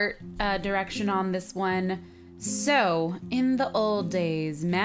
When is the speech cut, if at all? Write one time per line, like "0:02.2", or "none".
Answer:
none